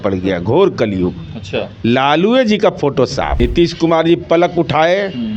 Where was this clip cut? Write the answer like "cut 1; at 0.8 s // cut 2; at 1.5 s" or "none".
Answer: cut 1; at 3.3 s